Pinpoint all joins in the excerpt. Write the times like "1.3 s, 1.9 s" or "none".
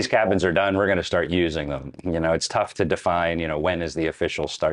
none